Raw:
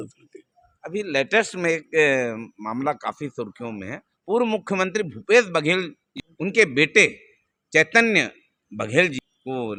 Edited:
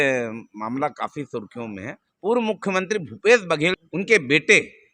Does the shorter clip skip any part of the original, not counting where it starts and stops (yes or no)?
yes